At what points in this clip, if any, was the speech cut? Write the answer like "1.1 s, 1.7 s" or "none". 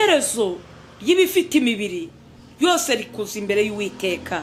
none